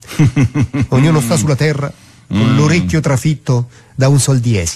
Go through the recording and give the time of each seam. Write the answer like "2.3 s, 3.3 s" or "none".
none